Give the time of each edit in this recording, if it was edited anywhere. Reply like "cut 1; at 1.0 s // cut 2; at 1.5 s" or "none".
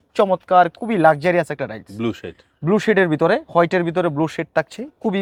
none